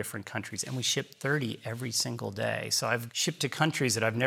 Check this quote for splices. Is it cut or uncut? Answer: cut